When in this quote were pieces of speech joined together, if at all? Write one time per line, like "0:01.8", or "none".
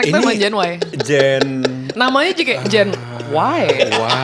none